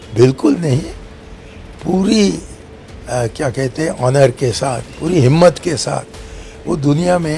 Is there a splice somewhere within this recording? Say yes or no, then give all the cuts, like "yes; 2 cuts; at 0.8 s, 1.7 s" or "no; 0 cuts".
yes; 1 cut; at 4.9 s